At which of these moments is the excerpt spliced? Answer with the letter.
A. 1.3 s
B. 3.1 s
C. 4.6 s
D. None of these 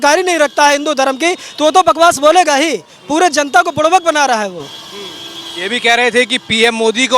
D